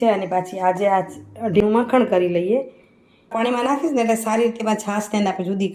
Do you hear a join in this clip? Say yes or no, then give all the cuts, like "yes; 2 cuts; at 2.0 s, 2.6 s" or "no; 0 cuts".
yes; 2 cuts; at 1.6 s, 3.3 s